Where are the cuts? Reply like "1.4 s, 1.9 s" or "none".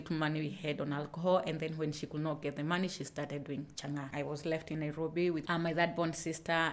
4.1 s